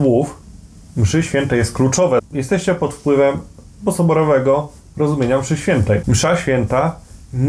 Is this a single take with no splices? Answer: no; 2 cuts; at 2.2 s, 6.0 s

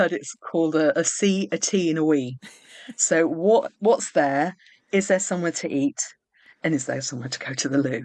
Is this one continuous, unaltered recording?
yes; 0 cuts

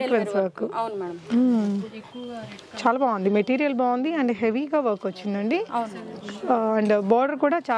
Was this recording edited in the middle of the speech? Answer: no; 0 cuts

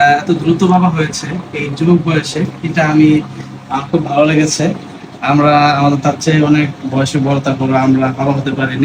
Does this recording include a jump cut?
no; 0 cuts

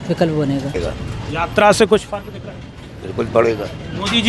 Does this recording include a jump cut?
no; 0 cuts

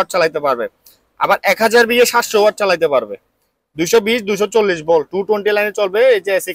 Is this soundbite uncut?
yes; 0 cuts

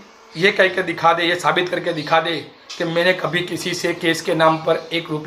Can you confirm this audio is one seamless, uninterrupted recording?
yes; 0 cuts

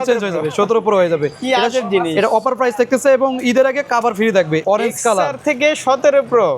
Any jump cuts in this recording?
yes; 1 cut; at 4.6 s

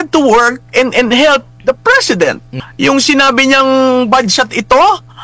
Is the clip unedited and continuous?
no; 1 cut; at 2.6 s

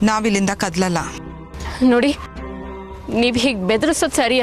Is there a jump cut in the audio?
yes; 1 cut; at 1.1 s

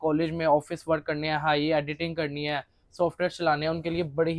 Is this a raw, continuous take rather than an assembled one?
yes; 0 cuts

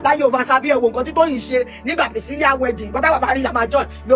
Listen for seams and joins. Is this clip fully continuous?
yes; 0 cuts

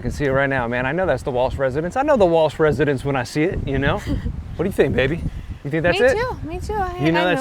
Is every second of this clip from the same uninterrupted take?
yes; 0 cuts

